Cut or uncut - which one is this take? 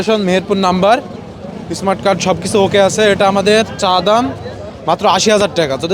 uncut